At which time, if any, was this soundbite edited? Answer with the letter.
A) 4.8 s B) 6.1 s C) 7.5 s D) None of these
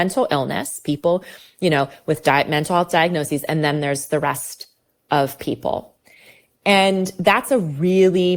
D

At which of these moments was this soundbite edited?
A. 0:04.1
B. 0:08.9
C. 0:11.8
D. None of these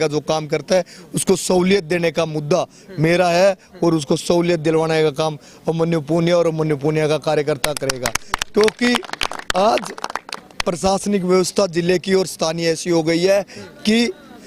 D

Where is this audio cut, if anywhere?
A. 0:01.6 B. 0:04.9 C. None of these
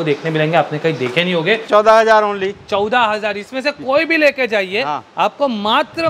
A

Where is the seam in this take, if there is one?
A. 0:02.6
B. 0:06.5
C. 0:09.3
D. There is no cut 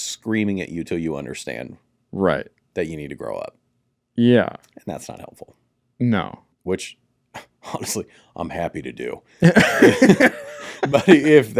B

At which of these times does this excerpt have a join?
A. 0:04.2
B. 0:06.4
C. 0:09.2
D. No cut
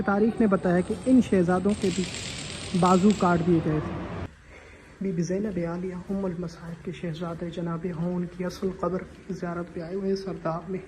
A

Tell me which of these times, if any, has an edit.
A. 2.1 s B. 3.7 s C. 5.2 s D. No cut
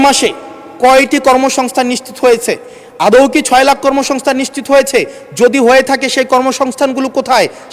D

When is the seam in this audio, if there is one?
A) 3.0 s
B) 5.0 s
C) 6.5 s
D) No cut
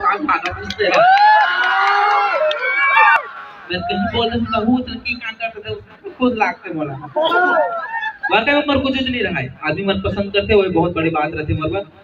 A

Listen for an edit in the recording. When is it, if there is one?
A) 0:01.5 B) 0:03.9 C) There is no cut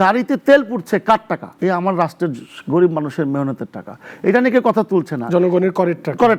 A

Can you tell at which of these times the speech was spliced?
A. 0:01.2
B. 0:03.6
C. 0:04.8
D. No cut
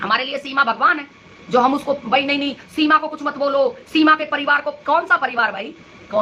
D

